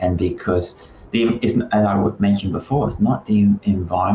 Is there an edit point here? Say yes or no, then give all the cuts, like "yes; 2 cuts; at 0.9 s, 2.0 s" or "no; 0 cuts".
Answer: no; 0 cuts